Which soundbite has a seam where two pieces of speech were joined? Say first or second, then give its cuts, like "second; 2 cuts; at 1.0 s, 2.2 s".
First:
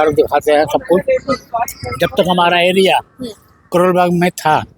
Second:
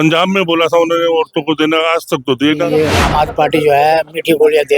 second; 1 cut; at 2.7 s